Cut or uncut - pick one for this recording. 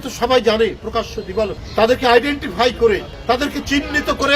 cut